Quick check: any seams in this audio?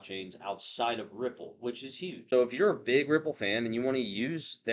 yes; 1 cut; at 2.2 s

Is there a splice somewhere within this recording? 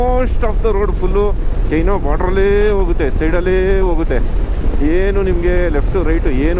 no; 0 cuts

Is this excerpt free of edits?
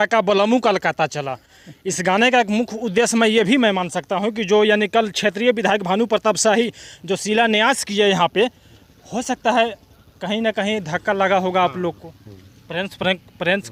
yes; 0 cuts

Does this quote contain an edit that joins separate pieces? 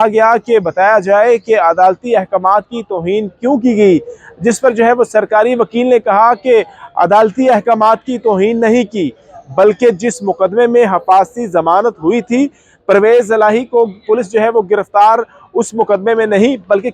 no; 0 cuts

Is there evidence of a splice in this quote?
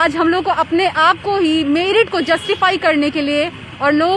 no; 0 cuts

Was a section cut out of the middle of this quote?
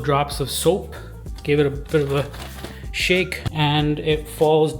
yes; 1 cut; at 3.4 s

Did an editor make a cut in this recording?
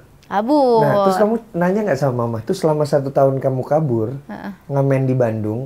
no; 0 cuts

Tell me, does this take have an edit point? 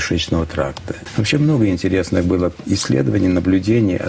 yes; 1 cut; at 1.0 s

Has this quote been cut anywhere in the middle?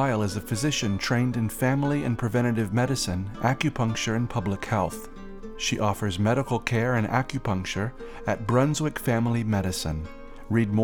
no; 0 cuts

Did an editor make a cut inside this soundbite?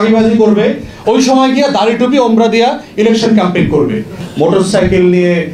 yes; 1 cut; at 4.2 s

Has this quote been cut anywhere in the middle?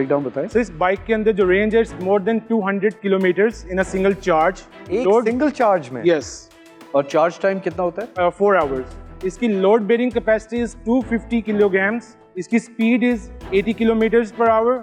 no; 0 cuts

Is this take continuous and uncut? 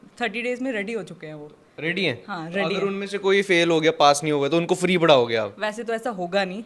yes; 0 cuts

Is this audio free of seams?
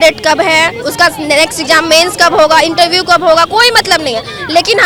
yes; 0 cuts

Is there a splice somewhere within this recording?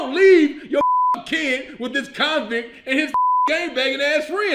no; 0 cuts

